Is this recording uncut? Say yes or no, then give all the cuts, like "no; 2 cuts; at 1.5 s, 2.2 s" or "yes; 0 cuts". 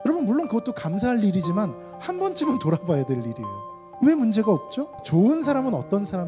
no; 1 cut; at 5.0 s